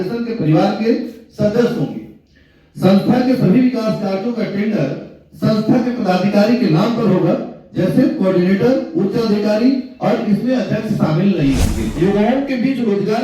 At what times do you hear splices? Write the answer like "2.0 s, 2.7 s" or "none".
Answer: 12.0 s